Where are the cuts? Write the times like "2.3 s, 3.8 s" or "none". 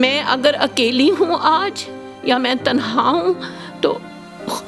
none